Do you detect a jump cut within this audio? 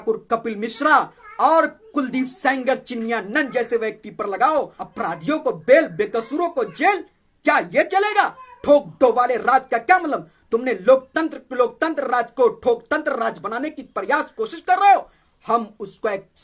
yes; 2 cuts; at 4.8 s, 15.3 s

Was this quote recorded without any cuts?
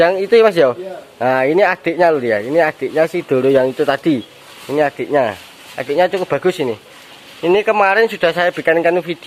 yes; 0 cuts

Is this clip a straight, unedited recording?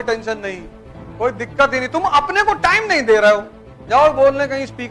no; 1 cut; at 3.7 s

